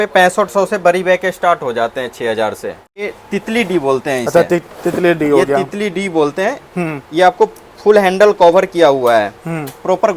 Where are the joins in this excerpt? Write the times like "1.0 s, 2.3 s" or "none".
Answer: 3.1 s